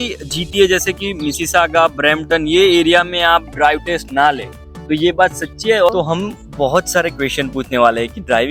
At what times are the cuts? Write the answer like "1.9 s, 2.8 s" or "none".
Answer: 5.9 s